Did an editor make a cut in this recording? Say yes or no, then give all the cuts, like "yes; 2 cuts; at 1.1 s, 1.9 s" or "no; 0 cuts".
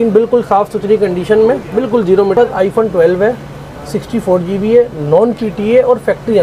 yes; 1 cut; at 2.3 s